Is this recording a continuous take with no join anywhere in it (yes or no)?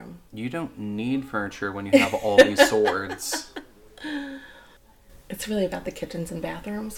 yes